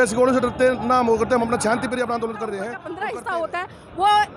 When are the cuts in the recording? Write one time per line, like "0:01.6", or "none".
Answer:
0:02.8